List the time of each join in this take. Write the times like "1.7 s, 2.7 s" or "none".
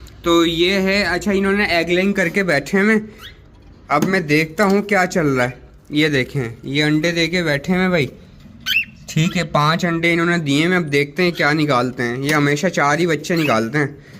none